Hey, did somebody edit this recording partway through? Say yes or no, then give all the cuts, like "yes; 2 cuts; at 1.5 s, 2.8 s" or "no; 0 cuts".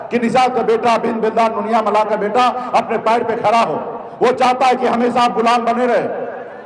no; 0 cuts